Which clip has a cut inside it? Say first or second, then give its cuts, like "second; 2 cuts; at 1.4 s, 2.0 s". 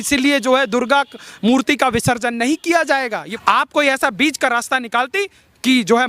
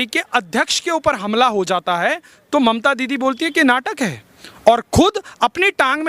first; 1 cut; at 3.3 s